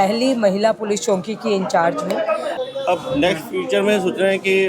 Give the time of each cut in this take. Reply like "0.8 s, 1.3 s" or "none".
2.5 s